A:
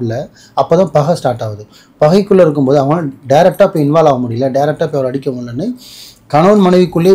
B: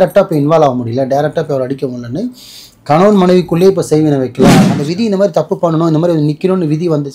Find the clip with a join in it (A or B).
B